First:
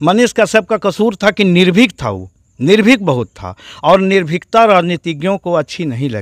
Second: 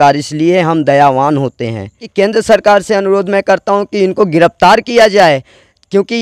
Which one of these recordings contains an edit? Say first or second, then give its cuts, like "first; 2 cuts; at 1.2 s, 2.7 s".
second; 1 cut; at 2.1 s